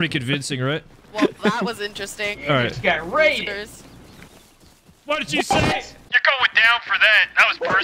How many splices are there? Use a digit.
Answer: 1